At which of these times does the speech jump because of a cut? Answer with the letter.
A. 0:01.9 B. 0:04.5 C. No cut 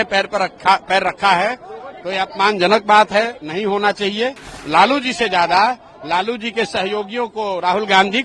B